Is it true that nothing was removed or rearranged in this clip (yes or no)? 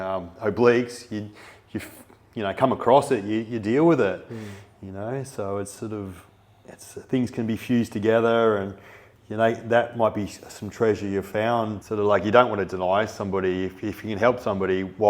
no